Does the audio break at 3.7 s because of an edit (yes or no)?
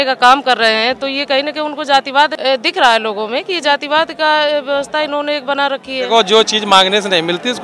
no